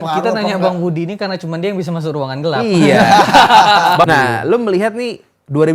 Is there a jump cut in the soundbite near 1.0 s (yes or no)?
no